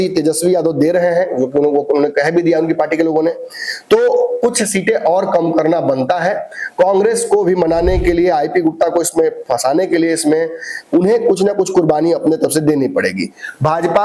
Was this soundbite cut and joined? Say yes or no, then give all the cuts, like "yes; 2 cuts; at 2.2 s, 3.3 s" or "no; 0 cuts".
no; 0 cuts